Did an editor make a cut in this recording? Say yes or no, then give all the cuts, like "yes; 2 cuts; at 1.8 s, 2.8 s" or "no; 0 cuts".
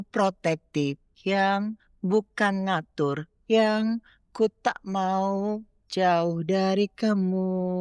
no; 0 cuts